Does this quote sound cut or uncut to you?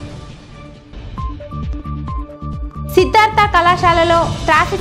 cut